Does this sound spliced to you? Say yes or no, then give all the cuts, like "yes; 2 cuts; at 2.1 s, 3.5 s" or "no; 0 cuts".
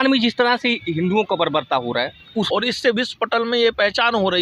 yes; 1 cut; at 2.5 s